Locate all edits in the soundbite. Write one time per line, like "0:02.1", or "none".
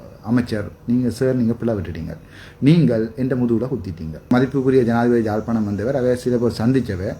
0:04.3